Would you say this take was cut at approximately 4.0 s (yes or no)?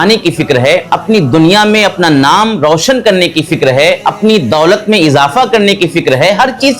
yes